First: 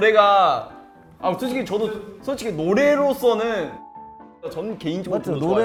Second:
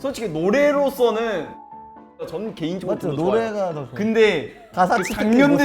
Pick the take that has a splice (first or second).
second